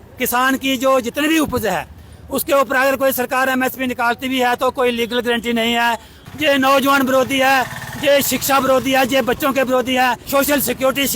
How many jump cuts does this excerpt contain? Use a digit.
2